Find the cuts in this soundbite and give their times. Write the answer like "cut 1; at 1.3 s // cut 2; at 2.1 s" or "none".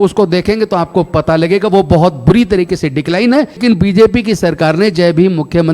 cut 1; at 3.6 s